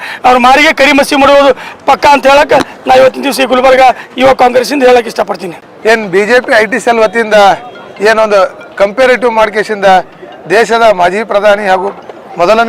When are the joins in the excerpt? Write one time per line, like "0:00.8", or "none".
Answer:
none